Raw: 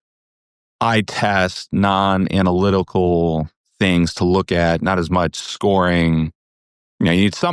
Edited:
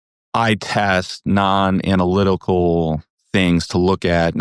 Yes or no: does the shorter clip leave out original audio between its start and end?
no